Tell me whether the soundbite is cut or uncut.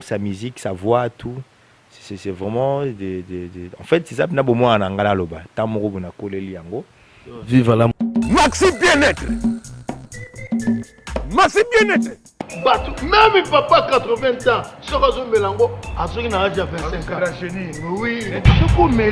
cut